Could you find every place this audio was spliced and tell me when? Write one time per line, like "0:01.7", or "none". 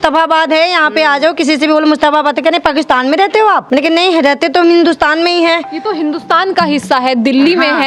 0:03.6